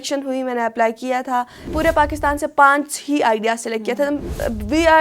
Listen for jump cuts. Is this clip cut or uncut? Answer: cut